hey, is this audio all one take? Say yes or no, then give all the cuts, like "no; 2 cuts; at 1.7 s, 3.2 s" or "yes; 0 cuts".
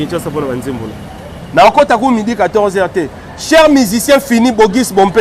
yes; 0 cuts